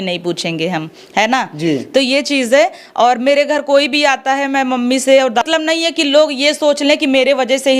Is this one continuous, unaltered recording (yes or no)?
no